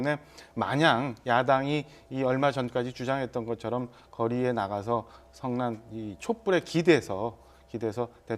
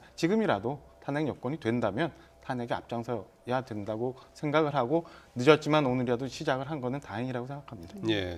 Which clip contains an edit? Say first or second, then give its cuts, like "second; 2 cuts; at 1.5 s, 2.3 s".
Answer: first; 1 cut; at 3.8 s